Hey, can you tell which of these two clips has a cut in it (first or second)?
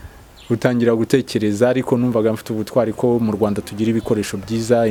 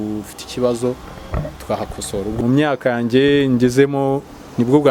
second